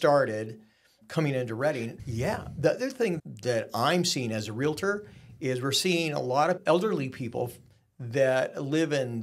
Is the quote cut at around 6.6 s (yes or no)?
yes